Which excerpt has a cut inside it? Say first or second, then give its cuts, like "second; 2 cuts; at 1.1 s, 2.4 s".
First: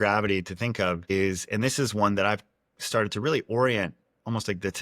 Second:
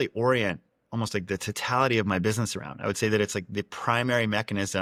first; 1 cut; at 1.1 s